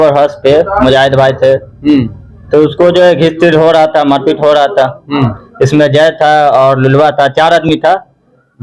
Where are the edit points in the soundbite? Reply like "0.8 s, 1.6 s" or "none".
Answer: none